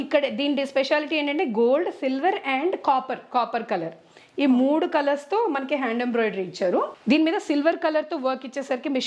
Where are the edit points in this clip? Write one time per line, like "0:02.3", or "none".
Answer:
0:06.9